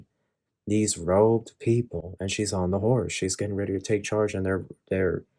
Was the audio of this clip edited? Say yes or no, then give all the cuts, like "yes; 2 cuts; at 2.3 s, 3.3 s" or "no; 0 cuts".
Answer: no; 0 cuts